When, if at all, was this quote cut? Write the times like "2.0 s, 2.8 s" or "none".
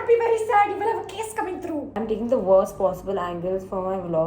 2.0 s